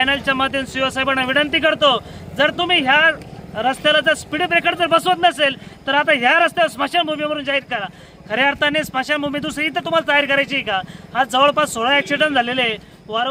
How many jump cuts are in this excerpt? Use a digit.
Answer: 0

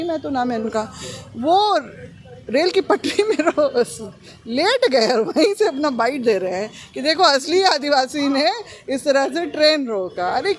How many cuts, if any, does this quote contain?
0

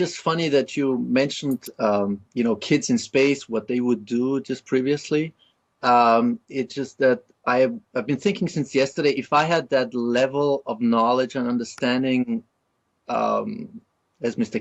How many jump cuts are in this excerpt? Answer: 1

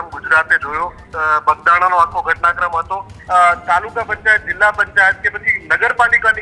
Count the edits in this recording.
2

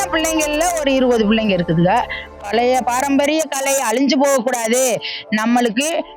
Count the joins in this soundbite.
1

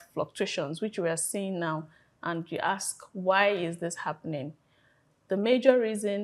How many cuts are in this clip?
0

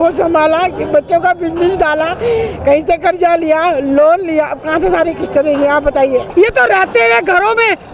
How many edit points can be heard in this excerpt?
1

